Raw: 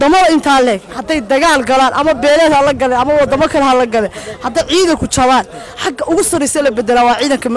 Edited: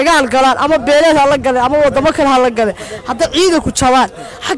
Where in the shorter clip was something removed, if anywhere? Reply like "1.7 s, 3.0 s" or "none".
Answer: none